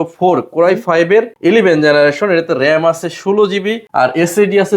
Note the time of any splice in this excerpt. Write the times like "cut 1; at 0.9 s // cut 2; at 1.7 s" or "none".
cut 1; at 3.8 s